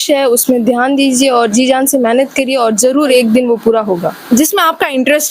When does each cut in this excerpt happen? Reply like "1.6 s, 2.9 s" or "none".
4.2 s